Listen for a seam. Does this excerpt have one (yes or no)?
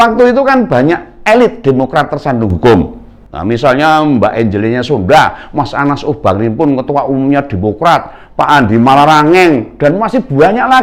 no